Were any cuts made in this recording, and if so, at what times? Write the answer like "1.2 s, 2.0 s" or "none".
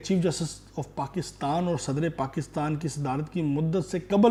none